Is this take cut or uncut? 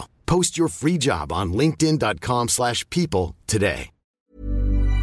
cut